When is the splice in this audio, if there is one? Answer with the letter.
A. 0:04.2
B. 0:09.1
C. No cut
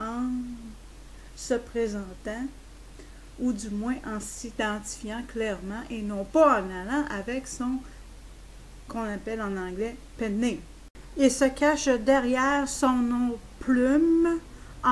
A